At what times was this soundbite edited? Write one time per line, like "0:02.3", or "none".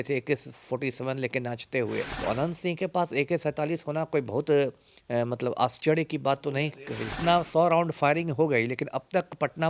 0:02.1
0:07.1